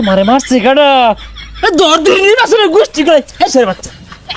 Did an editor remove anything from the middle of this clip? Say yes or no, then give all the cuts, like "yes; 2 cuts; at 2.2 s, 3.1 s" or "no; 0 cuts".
no; 0 cuts